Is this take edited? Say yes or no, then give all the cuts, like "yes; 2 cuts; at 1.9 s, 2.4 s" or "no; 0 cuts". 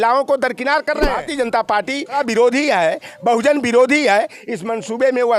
yes; 2 cuts; at 1.2 s, 2.2 s